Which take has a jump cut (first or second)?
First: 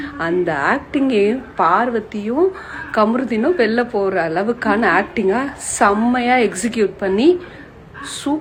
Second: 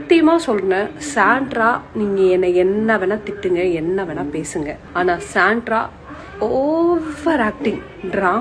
second